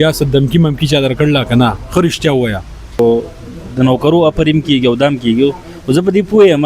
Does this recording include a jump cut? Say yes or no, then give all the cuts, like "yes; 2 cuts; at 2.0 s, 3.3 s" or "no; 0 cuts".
yes; 1 cut; at 3.0 s